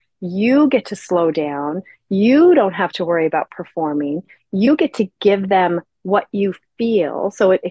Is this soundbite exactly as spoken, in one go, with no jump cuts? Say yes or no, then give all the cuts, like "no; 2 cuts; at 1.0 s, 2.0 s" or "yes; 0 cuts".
yes; 0 cuts